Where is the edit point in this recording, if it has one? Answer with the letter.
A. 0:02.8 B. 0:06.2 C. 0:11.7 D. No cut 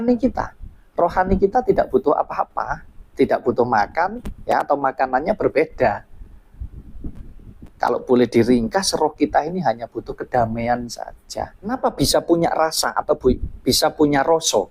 C